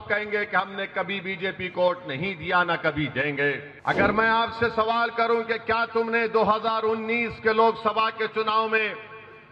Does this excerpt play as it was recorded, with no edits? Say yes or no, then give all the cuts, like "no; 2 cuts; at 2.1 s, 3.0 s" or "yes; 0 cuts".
no; 1 cut; at 3.7 s